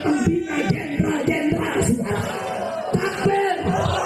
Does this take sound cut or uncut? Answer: uncut